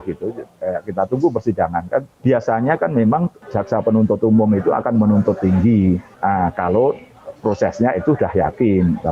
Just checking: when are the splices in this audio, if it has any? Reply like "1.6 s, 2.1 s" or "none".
2.1 s, 3.4 s, 6.1 s